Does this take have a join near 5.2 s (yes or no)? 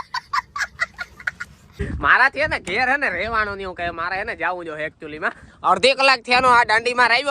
no